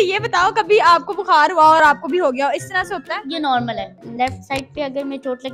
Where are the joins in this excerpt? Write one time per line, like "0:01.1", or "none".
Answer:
0:04.0